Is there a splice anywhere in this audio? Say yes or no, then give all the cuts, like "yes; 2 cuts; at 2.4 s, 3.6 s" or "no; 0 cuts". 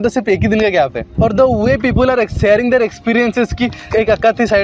no; 0 cuts